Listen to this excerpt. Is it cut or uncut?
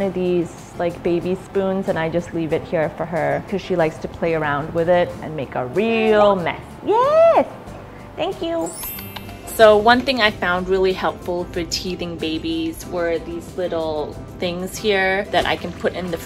cut